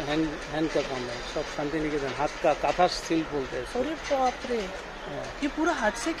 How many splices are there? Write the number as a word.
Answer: zero